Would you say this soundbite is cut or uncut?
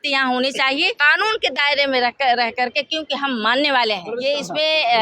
cut